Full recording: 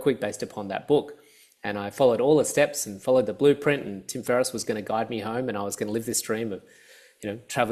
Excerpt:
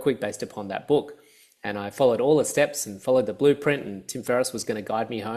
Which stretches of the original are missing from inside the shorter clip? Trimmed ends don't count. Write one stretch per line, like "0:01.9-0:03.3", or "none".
none